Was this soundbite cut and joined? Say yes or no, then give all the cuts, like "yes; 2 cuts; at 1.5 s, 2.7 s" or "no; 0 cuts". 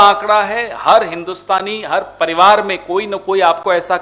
no; 0 cuts